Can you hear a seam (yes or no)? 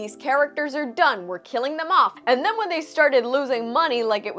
yes